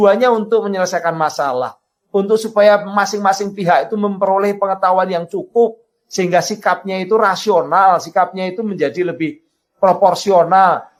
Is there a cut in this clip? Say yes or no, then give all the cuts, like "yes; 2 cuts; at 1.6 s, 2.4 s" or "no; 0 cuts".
no; 0 cuts